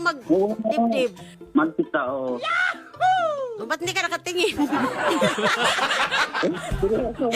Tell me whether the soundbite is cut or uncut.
uncut